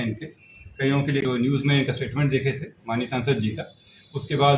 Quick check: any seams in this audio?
yes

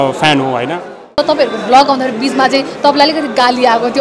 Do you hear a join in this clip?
yes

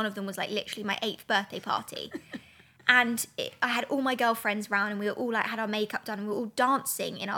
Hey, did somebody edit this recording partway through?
no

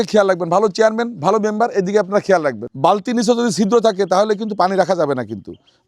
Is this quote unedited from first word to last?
no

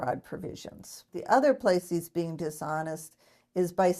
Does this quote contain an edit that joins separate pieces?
yes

